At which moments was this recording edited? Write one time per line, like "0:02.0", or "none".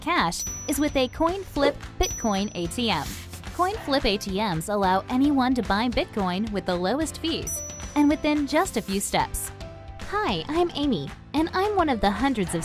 none